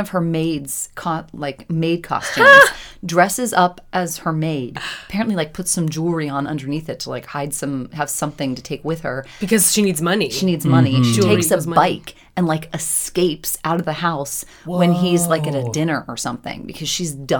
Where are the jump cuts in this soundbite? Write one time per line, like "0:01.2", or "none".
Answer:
none